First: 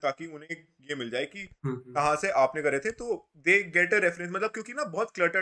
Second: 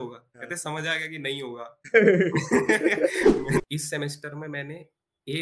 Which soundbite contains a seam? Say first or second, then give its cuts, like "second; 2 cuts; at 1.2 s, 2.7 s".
second; 1 cut; at 3.6 s